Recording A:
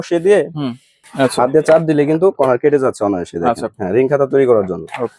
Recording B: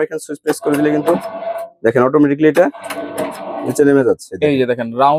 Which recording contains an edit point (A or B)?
A